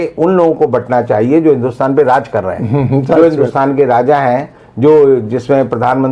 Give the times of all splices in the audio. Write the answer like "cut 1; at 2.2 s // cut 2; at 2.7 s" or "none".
none